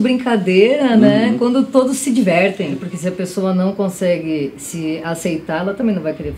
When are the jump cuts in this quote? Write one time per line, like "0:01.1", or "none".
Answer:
0:02.8